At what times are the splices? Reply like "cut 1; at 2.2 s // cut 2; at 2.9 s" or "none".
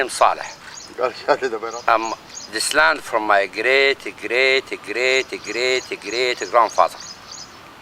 cut 1; at 1.6 s